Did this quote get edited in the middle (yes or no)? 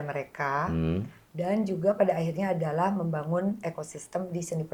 no